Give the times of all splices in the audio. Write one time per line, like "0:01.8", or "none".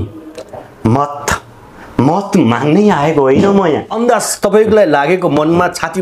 0:03.9